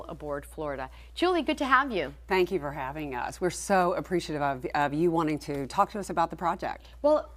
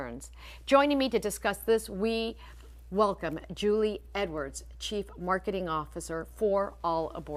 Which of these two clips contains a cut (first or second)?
first